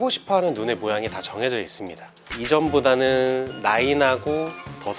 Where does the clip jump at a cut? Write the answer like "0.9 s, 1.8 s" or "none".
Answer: 2.2 s